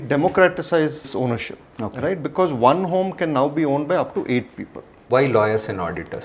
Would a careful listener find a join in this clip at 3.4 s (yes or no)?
no